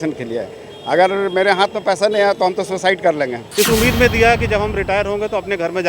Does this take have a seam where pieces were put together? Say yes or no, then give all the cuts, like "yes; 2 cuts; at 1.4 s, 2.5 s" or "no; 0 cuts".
yes; 1 cut; at 3.4 s